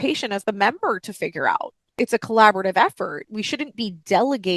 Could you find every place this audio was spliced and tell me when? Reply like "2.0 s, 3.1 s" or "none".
2.0 s